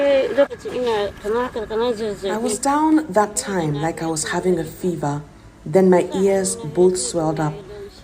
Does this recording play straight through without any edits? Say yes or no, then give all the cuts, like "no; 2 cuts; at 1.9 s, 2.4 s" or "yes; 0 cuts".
yes; 0 cuts